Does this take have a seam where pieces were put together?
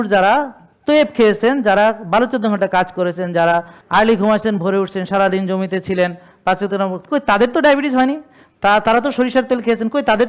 yes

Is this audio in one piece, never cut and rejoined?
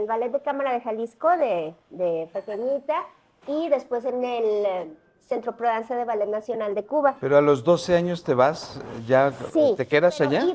no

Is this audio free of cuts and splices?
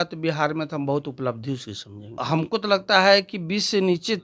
no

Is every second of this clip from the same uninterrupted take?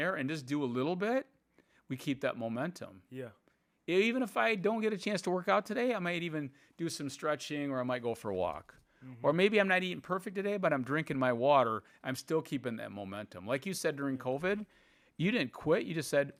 yes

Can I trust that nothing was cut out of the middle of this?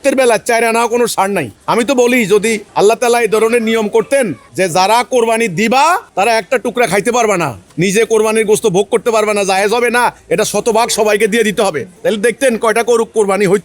no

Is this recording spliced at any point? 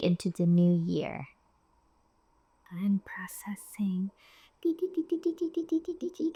no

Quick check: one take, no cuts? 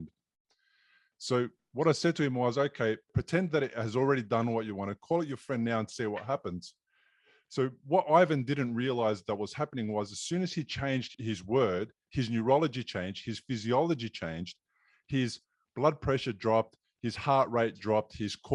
no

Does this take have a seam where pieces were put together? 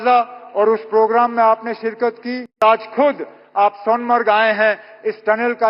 yes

